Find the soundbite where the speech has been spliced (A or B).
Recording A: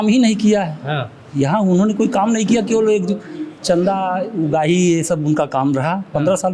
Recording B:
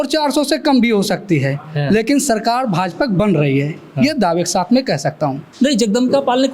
B